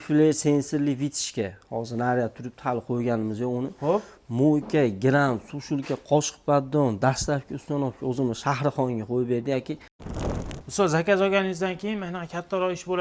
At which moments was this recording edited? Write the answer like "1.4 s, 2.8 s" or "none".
10.1 s